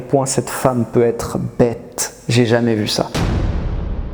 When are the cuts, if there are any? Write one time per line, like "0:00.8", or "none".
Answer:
none

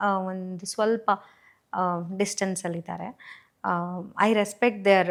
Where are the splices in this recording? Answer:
none

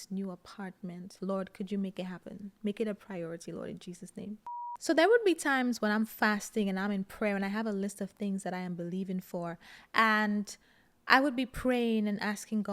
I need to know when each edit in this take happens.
0:01.1
0:04.6

